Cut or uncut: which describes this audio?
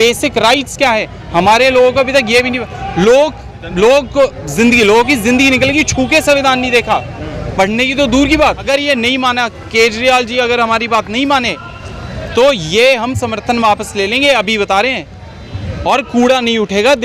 cut